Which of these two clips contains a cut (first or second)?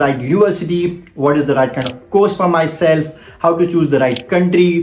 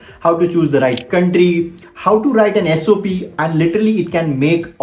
second